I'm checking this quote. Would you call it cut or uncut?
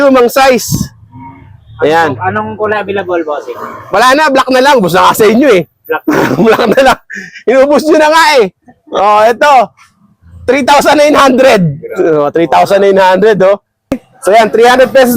cut